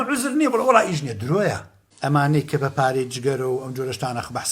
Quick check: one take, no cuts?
no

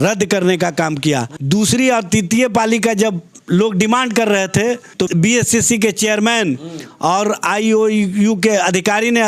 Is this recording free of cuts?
no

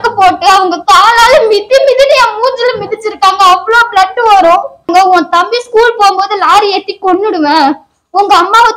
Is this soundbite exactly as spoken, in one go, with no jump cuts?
no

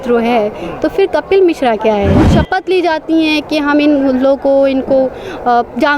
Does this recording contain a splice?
yes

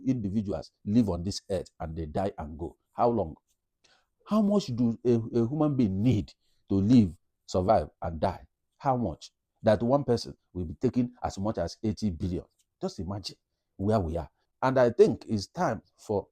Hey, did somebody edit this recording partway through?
yes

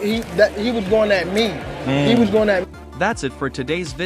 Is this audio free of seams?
no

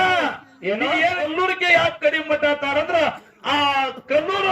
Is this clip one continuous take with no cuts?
no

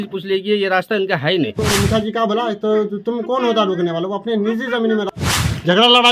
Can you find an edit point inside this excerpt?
yes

